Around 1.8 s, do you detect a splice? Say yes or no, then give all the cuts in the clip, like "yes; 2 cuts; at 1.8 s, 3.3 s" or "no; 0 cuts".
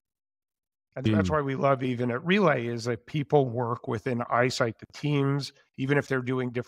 yes; 1 cut; at 1.8 s